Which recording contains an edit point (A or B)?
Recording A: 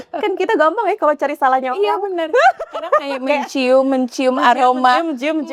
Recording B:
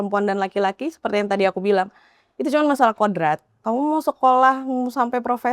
B